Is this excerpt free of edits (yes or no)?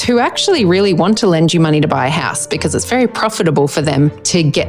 yes